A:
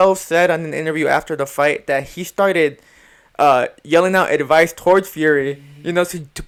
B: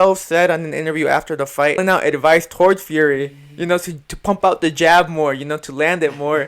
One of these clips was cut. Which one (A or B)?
B